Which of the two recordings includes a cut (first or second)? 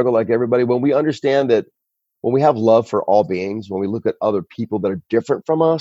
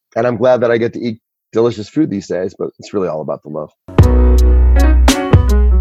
second